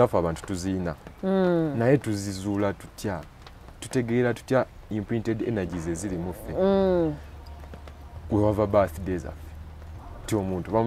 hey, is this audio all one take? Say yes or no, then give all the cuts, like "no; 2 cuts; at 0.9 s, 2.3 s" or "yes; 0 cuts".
yes; 0 cuts